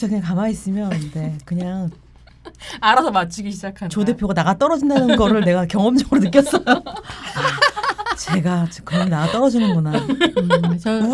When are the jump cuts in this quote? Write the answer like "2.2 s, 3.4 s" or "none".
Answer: none